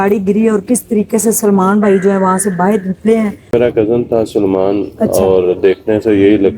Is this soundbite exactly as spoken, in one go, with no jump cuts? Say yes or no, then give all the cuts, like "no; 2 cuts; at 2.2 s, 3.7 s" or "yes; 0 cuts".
no; 1 cut; at 3.5 s